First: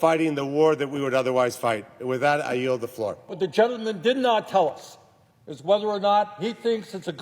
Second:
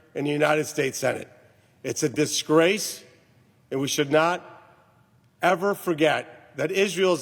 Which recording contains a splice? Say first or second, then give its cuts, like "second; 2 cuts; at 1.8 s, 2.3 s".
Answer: first; 1 cut; at 3.3 s